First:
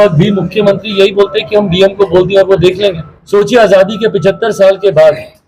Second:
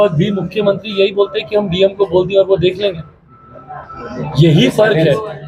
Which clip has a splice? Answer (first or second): first